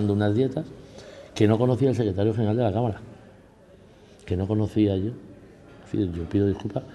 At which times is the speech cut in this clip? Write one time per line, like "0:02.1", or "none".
none